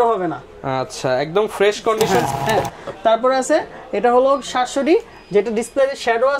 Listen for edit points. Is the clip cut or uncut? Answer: cut